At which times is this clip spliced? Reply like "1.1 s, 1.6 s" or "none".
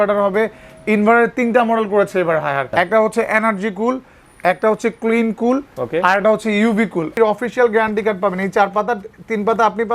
2.7 s, 7.1 s